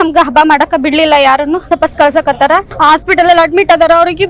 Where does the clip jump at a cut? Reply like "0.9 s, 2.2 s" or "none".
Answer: 1.6 s, 2.7 s